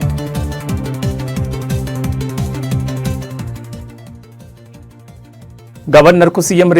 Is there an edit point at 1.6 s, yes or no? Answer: no